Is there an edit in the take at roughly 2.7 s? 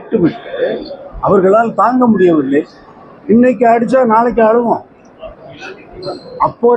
no; 0 cuts

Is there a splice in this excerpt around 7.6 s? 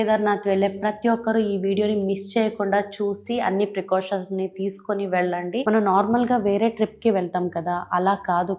no; 1 cut; at 5.6 s

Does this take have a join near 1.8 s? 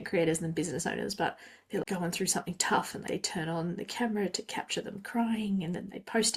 yes; 2 cuts; at 1.8 s, 3.0 s

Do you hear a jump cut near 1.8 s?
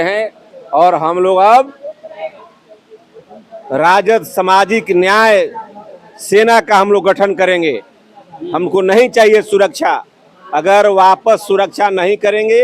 no; 0 cuts

